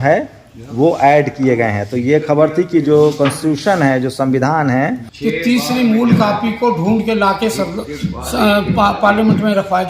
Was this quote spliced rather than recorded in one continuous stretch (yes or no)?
yes